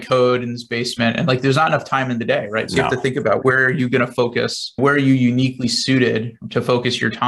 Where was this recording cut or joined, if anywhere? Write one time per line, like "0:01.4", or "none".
0:03.4
0:04.8